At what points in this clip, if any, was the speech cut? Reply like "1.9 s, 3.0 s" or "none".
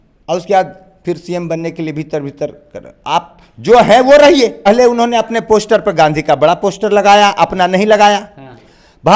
4.7 s